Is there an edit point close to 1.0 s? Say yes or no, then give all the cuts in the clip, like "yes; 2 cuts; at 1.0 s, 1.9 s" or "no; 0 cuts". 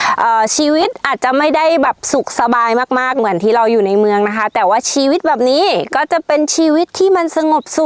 no; 0 cuts